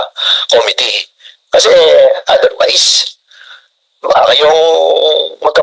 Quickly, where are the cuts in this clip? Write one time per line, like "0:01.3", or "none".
none